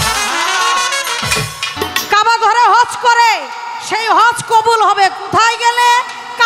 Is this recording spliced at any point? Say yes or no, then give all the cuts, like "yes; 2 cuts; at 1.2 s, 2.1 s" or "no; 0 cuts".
yes; 1 cut; at 1.7 s